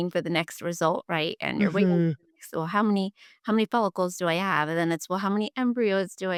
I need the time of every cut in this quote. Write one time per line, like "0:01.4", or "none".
none